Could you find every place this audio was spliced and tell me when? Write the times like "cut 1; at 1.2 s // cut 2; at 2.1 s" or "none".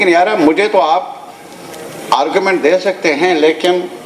none